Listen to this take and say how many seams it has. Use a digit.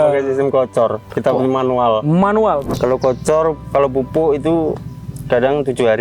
2